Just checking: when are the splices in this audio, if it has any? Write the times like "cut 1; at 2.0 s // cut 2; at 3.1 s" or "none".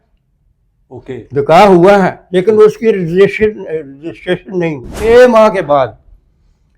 cut 1; at 4.9 s